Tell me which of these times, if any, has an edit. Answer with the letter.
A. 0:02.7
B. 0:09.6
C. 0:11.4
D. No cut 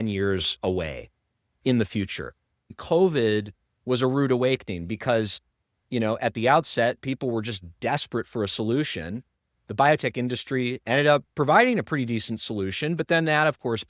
A